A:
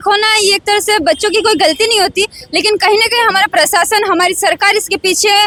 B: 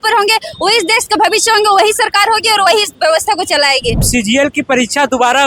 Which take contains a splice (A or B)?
B